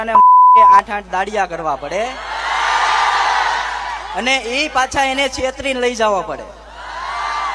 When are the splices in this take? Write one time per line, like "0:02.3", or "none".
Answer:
0:00.9